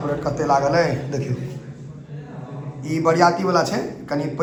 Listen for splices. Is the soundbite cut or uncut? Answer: uncut